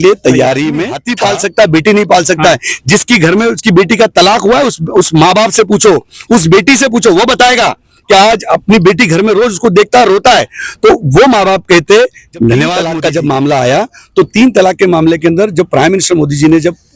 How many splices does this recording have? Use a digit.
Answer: 2